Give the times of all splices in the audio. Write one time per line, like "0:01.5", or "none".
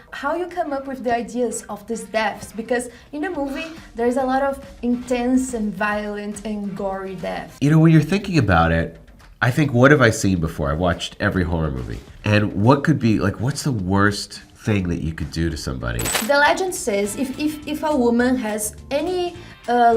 0:07.4
0:16.1

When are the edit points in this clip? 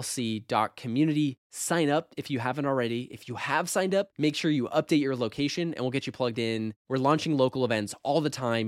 none

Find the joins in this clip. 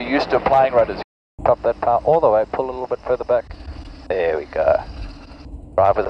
0:01.0

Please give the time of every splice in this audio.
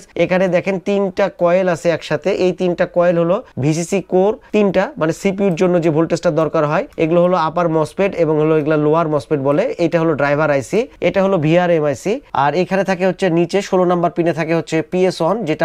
0:12.2

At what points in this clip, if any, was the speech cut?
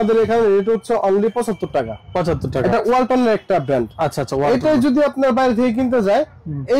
none

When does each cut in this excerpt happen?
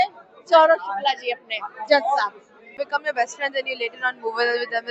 0:02.7

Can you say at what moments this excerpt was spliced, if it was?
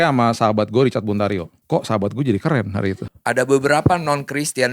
0:01.5
0:03.1

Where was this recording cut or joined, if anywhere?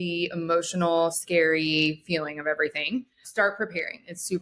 0:03.2

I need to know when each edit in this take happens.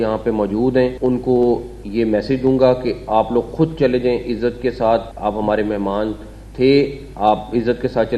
0:01.0
0:05.1

